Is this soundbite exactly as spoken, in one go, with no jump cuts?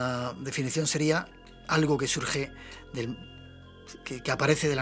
yes; 0 cuts

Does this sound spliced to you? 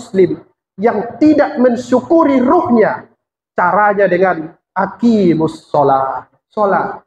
no; 0 cuts

